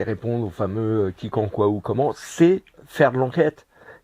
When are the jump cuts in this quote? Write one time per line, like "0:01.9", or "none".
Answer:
0:02.8

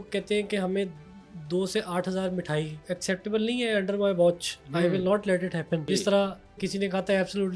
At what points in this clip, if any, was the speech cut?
0:02.9
0:05.8

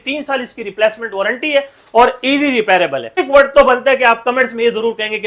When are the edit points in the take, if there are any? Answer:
0:03.2

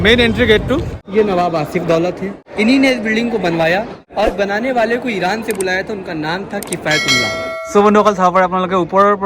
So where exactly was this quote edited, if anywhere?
0:01.0
0:02.4
0:04.0
0:07.5

